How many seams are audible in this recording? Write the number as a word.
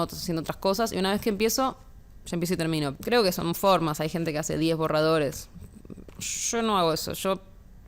one